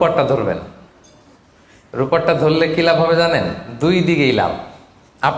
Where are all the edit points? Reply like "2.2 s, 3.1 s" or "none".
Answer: none